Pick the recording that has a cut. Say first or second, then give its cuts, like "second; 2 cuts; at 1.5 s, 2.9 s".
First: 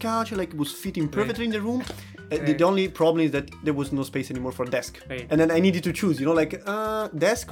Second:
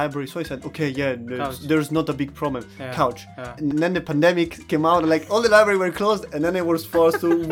second; 2 cuts; at 3.6 s, 4.6 s